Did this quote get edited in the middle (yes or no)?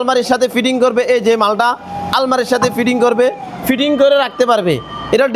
no